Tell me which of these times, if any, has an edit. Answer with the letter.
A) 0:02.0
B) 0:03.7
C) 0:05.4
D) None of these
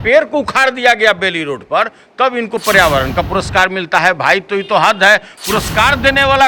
D